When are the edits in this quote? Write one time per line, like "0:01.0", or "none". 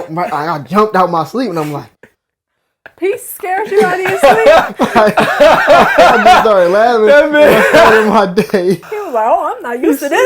0:08.9

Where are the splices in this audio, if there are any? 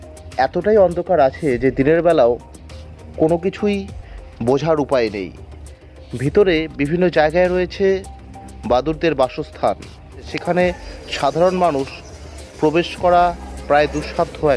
0:10.3

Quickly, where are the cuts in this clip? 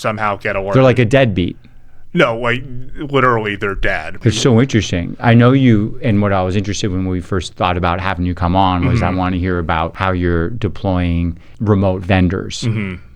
0:04.1
0:09.9
0:11.5

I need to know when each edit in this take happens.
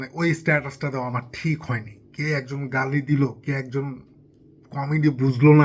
none

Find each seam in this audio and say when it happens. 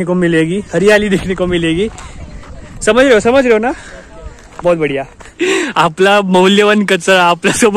0:05.2

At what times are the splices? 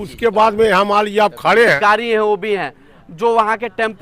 0:01.8

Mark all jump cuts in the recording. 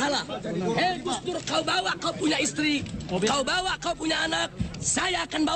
none

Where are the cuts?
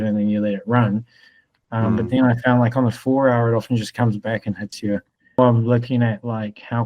0:05.4

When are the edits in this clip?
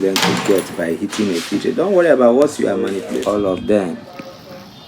0:03.1

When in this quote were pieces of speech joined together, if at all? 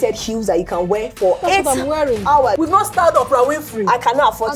0:01.4
0:02.6

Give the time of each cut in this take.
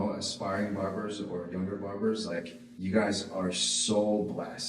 0:02.6

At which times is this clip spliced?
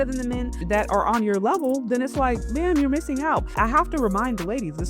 0:03.5

